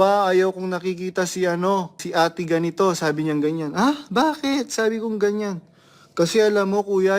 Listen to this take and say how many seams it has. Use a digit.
1